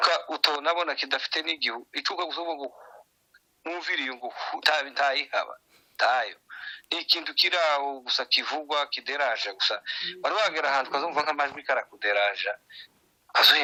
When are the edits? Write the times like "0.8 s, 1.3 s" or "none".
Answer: none